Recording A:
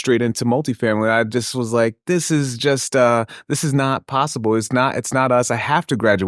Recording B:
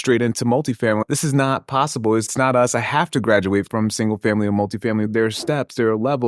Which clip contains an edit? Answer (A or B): B